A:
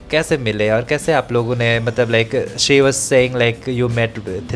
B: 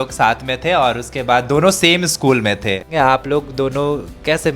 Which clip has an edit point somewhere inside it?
B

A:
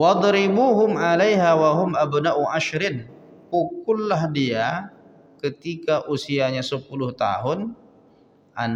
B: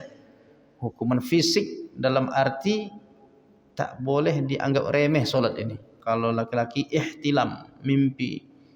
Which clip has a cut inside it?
B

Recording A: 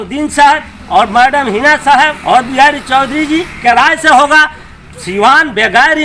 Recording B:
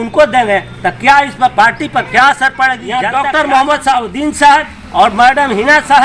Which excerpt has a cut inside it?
B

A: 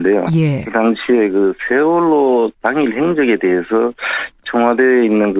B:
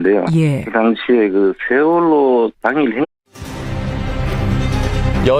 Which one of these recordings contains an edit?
A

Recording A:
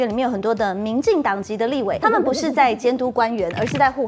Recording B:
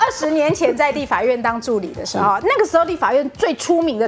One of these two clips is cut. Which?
A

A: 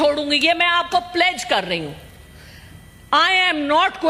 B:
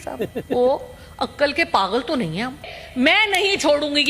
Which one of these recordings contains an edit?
B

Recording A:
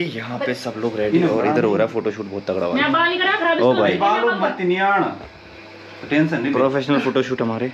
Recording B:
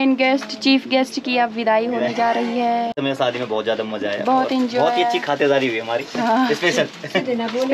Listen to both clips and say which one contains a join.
B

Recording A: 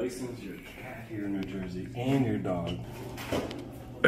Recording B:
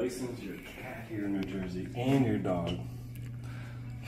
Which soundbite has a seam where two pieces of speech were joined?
A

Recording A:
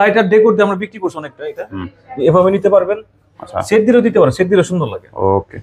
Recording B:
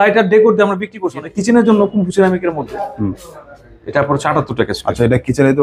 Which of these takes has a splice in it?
B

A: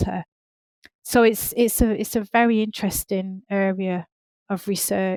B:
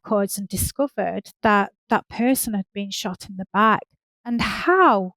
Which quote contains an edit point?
B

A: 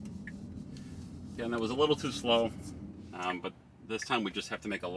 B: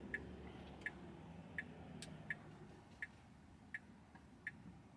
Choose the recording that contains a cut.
A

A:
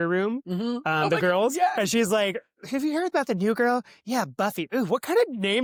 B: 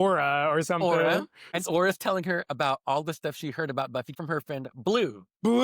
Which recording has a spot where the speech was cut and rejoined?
B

